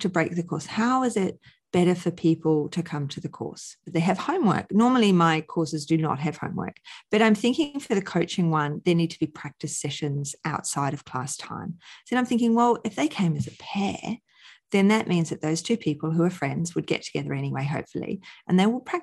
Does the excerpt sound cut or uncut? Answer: cut